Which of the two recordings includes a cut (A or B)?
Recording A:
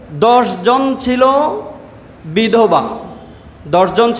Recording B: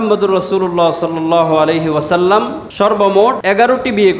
B